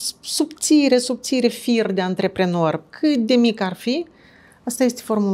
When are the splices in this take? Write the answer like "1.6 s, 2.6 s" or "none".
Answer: none